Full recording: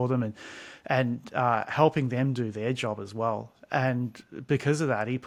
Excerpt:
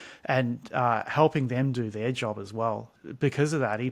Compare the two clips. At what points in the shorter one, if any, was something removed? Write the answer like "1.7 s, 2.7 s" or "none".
2.9 s